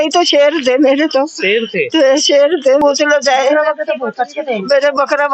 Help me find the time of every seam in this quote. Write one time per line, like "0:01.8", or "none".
0:02.8